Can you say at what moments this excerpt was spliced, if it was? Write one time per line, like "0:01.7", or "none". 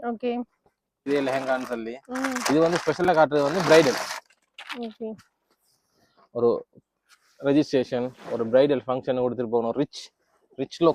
0:01.1